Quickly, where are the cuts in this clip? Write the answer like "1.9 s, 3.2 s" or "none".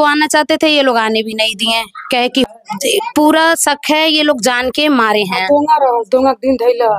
2.4 s